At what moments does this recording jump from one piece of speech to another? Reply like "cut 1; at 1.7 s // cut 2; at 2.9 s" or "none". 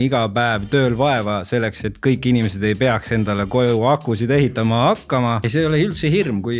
cut 1; at 5.4 s